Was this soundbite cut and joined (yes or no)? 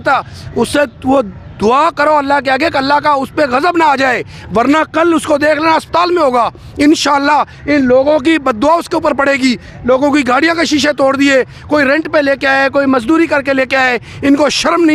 no